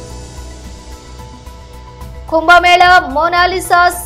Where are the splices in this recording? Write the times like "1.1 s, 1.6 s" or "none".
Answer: 0.9 s